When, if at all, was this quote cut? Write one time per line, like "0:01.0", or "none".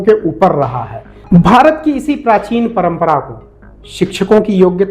0:01.1